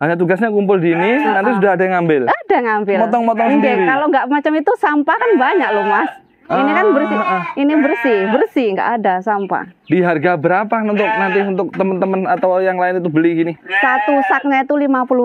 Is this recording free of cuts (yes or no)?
yes